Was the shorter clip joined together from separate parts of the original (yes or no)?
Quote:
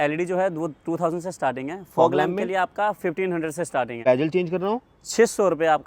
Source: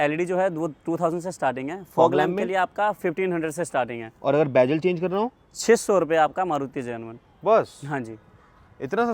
yes